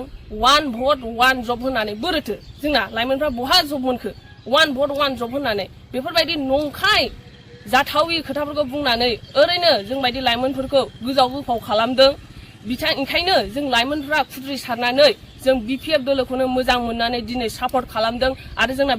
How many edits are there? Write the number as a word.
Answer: zero